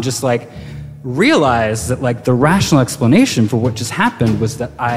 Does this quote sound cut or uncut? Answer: uncut